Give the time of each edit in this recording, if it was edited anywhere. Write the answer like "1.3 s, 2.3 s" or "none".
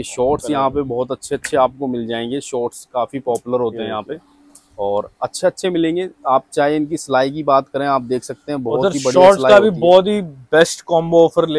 none